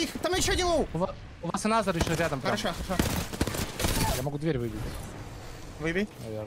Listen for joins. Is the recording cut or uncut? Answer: cut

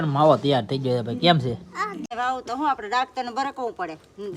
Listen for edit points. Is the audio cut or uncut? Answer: cut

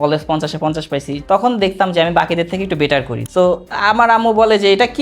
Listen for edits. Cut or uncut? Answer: cut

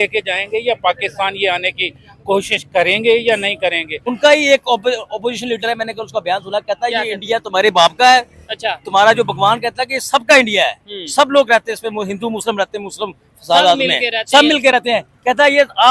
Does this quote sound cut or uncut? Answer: cut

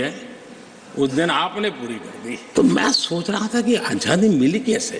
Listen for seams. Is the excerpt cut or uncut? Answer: cut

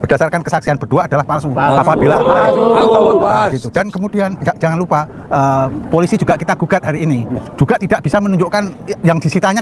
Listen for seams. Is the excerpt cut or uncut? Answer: uncut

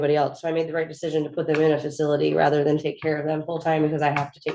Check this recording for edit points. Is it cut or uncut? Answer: uncut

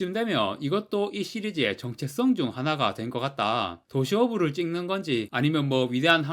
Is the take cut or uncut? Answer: cut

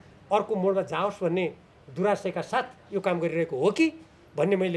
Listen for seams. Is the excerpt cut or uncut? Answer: uncut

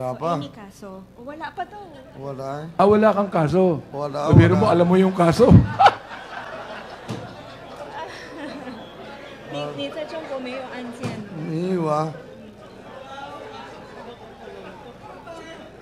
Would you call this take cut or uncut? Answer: uncut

